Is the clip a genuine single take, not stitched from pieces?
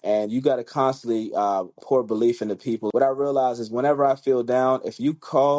no; 2 cuts; at 1.8 s, 2.9 s

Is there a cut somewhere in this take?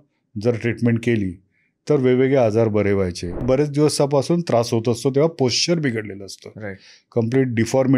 yes; 1 cut; at 3.4 s

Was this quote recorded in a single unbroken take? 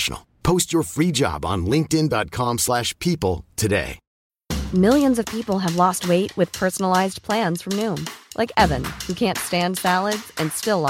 yes; 0 cuts

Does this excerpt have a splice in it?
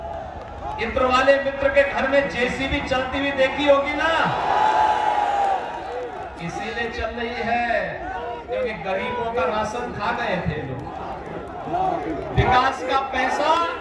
no; 0 cuts

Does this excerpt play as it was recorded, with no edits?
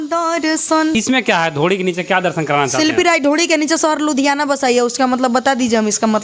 no; 1 cut; at 0.9 s

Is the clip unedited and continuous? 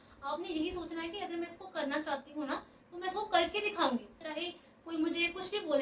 no; 1 cut; at 4.3 s

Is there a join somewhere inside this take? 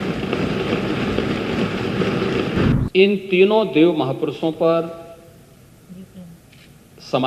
yes; 1 cut; at 2.7 s

